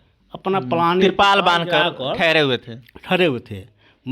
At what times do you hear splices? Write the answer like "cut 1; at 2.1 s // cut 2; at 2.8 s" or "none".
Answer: none